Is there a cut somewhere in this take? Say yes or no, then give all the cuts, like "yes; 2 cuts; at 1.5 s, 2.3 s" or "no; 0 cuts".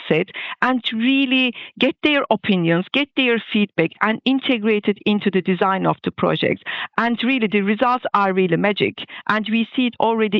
no; 0 cuts